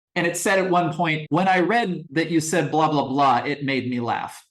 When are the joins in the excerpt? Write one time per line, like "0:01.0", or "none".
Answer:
0:01.2
0:02.0